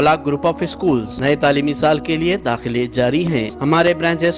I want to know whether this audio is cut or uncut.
cut